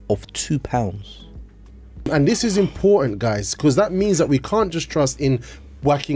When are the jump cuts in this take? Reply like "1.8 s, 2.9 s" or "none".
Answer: 2.1 s